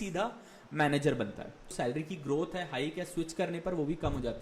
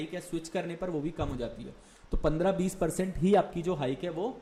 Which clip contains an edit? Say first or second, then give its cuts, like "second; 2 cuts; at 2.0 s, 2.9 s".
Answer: first; 1 cut; at 1.7 s